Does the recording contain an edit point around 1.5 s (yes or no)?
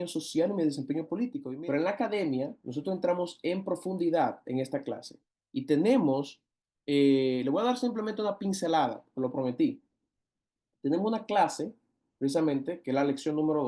yes